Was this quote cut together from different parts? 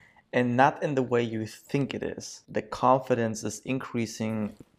yes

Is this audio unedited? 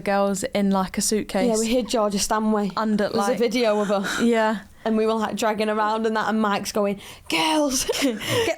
yes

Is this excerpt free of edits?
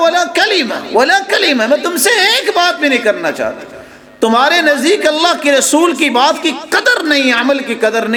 yes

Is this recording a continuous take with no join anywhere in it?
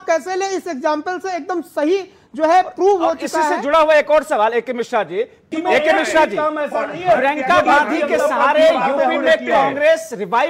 no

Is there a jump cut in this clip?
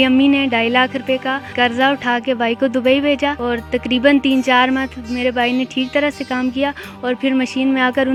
no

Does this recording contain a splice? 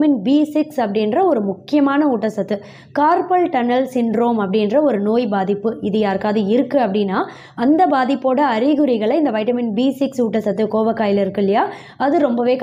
no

